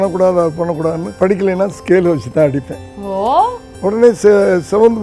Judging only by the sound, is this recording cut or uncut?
cut